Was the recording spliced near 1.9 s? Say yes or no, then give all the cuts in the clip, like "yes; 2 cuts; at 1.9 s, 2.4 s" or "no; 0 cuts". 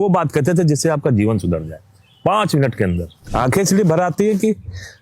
no; 1 cut; at 3.1 s